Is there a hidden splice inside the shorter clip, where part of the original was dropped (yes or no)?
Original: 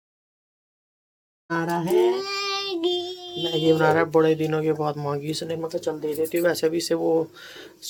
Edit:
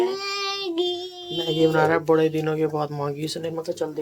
no